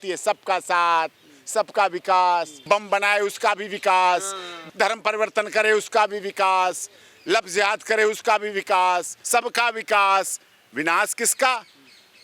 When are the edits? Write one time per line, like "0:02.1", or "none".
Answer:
0:02.5
0:04.6
0:09.2

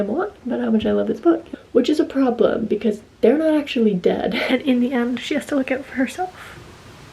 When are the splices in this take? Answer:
0:01.5
0:04.4

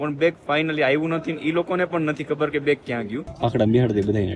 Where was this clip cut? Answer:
0:03.2

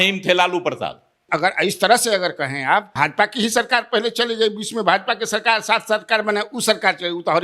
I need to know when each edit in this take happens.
0:01.2
0:02.9

